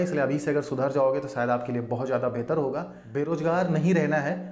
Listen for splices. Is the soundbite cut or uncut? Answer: cut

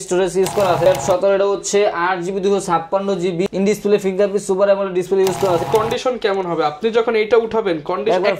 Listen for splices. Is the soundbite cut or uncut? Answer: cut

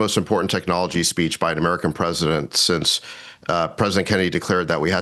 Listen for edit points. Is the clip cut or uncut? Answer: uncut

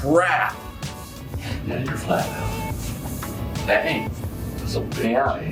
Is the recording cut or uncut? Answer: uncut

